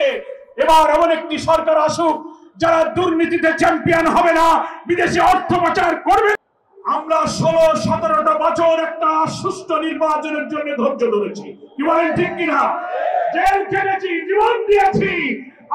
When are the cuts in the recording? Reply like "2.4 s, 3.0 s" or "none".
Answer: 6.3 s